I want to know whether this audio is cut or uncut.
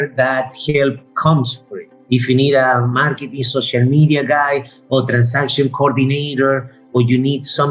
uncut